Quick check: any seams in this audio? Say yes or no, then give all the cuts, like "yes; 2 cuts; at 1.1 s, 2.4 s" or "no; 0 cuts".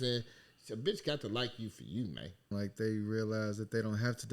yes; 1 cut; at 2.5 s